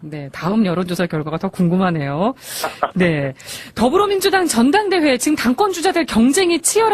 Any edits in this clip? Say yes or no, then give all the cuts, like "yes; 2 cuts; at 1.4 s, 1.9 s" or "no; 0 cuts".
yes; 1 cut; at 1.4 s